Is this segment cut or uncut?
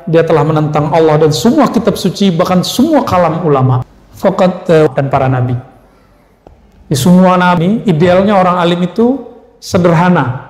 cut